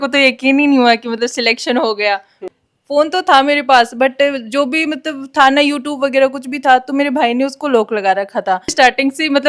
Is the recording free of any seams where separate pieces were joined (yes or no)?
no